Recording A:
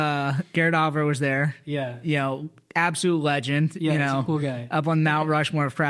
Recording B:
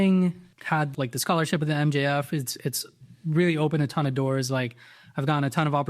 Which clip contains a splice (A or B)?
B